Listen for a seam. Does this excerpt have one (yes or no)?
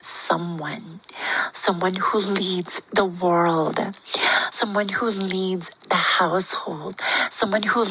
no